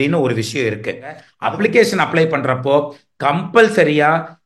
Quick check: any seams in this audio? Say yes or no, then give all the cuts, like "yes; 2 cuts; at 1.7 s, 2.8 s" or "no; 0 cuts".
yes; 1 cut; at 1.3 s